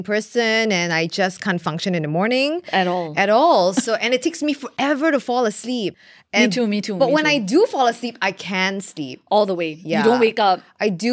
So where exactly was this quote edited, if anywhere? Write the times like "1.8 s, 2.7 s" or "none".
6.1 s